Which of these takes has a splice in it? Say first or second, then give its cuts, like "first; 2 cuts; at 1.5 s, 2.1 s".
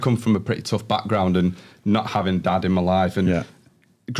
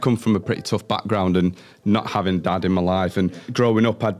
second; 1 cut; at 3.3 s